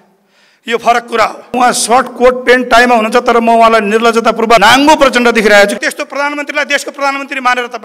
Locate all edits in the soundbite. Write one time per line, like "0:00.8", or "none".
0:01.5
0:04.6
0:05.8